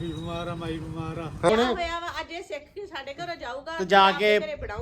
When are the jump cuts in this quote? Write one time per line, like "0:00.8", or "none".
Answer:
0:01.5